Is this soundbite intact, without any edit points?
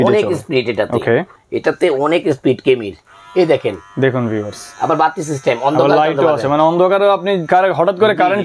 yes; 0 cuts

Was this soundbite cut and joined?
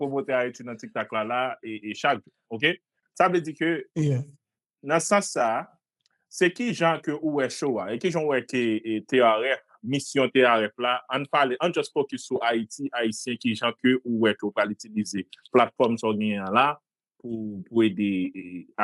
no; 0 cuts

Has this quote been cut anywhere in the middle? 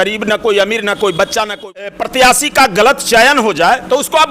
yes; 1 cut; at 1.9 s

